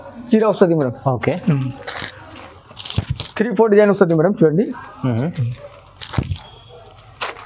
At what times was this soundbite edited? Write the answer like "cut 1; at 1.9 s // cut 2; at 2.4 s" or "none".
cut 1; at 2.1 s